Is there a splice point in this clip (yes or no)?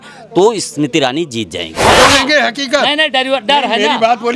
yes